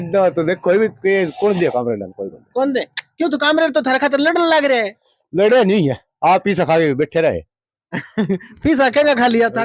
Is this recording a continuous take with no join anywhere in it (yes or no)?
yes